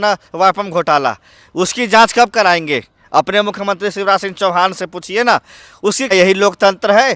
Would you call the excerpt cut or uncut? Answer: cut